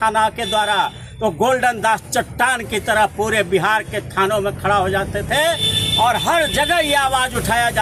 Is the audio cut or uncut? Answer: uncut